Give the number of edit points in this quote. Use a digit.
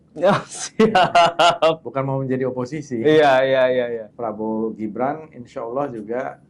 1